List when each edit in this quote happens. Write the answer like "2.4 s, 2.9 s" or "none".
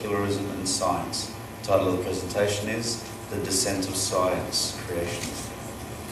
1.2 s